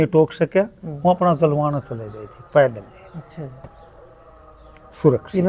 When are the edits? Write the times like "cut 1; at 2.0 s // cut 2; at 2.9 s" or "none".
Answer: none